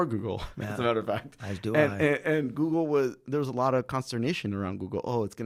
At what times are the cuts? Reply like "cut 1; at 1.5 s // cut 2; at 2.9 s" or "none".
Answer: none